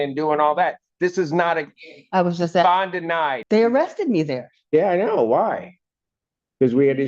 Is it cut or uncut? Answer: cut